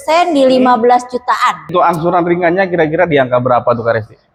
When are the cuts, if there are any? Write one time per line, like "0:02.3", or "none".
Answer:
none